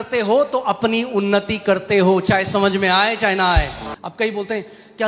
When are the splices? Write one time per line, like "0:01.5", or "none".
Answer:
0:03.8